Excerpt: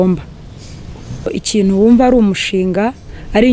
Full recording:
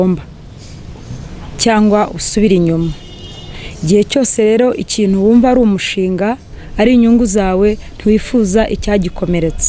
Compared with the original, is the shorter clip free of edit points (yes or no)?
no